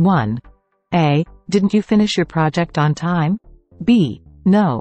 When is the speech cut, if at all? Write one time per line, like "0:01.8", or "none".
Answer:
none